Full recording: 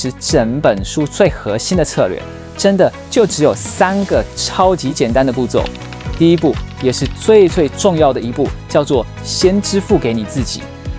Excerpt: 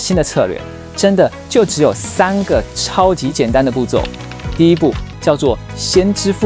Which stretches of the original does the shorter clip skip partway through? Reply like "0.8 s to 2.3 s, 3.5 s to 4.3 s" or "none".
6.7 s to 8.6 s